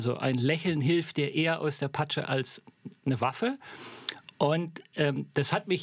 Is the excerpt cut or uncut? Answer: uncut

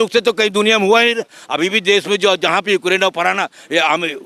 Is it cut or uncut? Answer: uncut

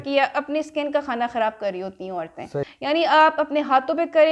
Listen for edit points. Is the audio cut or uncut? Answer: cut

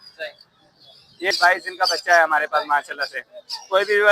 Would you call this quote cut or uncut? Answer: cut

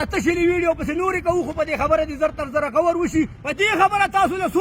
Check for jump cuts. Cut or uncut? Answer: cut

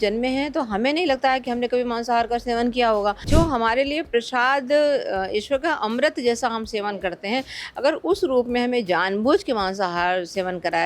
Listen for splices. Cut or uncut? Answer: cut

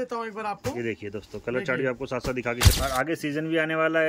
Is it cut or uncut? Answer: cut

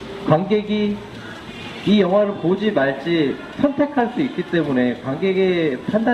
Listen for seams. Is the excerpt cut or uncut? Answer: cut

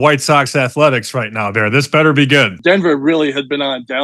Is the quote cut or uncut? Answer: cut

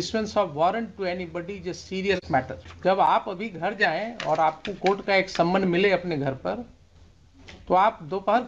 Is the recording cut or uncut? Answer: cut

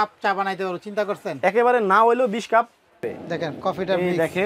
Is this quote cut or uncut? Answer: cut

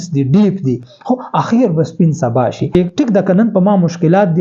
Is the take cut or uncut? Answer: cut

